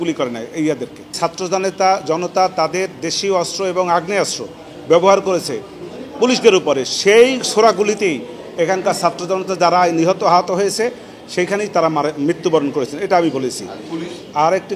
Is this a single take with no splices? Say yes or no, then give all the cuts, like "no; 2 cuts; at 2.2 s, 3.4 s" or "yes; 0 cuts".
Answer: no; 1 cut; at 1.1 s